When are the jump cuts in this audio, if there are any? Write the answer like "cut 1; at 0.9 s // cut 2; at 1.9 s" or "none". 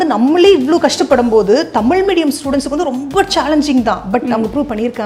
none

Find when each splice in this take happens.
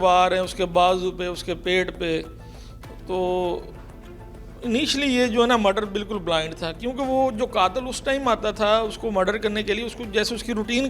none

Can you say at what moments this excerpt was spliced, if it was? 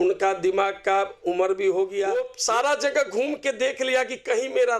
cut 1; at 2.3 s

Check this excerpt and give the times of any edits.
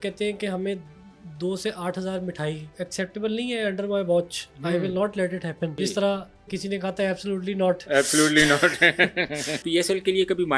cut 1; at 2.8 s // cut 2; at 5.7 s // cut 3; at 9.6 s

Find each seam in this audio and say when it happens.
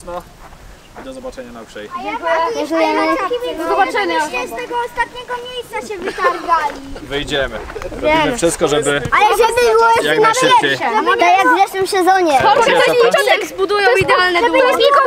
none

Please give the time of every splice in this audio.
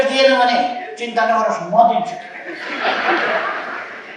none

